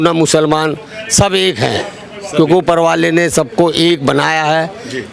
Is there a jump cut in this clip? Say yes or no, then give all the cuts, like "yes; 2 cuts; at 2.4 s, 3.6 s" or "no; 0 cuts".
no; 0 cuts